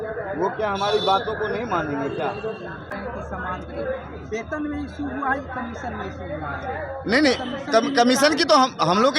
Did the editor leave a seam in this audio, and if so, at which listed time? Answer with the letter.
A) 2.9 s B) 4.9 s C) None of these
A